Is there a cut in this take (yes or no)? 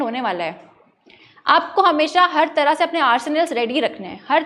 no